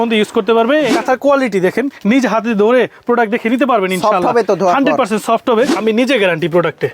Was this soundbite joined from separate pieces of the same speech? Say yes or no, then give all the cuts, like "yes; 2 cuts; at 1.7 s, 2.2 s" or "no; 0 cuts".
yes; 2 cuts; at 0.9 s, 5.7 s